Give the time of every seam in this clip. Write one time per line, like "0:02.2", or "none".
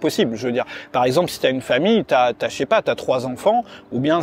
none